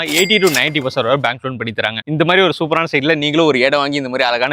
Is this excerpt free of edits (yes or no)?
no